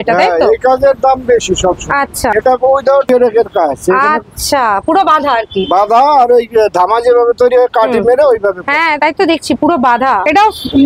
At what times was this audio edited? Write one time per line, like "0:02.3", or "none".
none